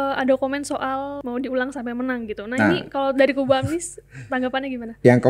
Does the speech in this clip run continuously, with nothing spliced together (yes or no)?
no